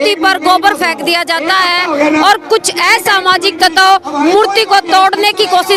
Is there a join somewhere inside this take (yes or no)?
no